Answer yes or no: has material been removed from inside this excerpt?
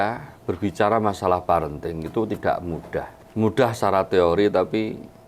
yes